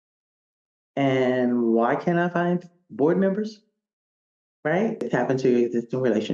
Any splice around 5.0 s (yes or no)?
yes